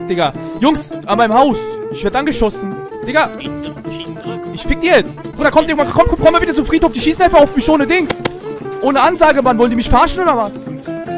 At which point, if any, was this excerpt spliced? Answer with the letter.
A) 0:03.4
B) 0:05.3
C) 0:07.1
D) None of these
B